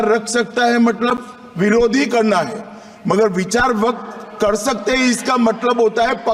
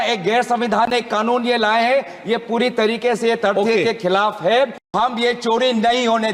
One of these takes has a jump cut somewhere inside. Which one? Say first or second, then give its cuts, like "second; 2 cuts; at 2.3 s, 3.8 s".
second; 1 cut; at 4.9 s